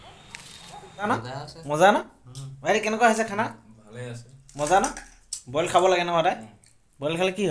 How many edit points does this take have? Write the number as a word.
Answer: one